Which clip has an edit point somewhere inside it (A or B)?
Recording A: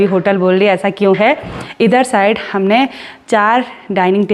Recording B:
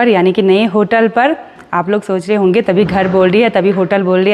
A